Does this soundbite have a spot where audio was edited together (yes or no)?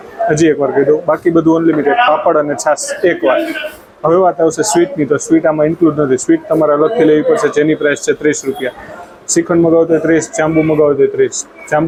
no